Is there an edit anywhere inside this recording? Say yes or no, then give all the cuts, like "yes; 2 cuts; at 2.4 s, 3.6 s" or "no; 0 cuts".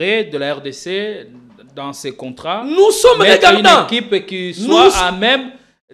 no; 0 cuts